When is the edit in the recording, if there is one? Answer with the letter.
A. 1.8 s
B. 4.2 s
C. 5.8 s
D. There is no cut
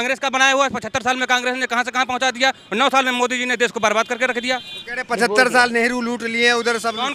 D